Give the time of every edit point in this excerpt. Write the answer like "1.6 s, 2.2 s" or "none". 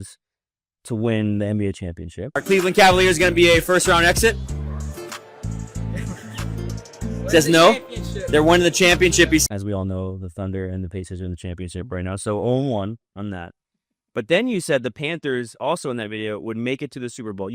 9.4 s

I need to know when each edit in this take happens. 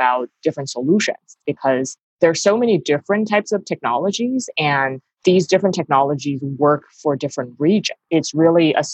8.0 s

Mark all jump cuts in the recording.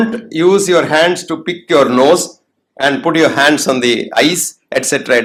none

